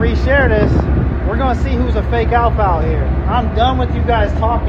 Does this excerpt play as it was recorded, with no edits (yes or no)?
yes